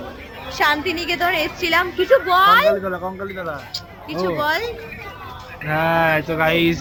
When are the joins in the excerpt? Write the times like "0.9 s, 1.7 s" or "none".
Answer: none